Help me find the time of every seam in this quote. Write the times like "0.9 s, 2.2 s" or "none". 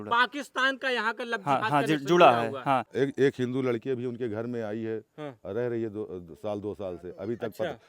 2.9 s